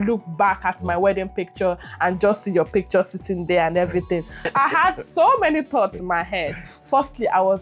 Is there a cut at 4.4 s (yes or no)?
yes